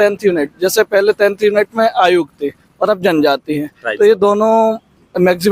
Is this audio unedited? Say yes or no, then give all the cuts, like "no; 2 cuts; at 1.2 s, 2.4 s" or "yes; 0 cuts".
yes; 0 cuts